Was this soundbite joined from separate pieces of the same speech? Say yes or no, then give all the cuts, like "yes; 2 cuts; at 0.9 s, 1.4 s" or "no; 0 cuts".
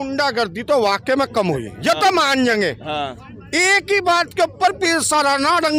no; 0 cuts